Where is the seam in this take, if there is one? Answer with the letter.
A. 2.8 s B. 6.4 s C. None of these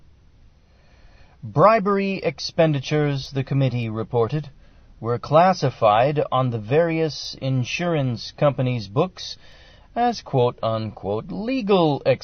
A